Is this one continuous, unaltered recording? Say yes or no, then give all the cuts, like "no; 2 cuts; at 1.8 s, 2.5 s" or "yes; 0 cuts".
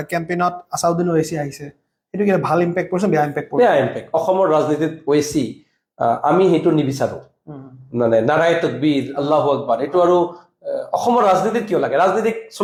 yes; 0 cuts